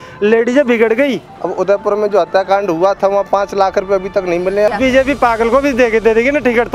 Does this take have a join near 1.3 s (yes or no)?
yes